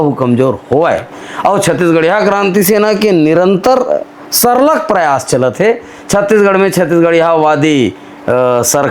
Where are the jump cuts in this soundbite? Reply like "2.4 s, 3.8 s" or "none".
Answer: none